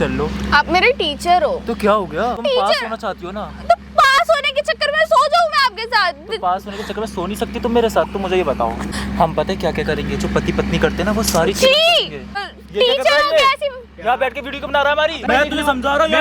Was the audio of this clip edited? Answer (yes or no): yes